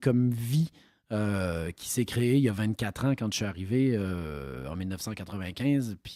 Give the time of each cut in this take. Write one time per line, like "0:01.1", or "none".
none